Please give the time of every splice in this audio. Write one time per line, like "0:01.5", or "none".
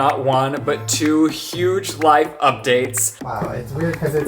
0:03.0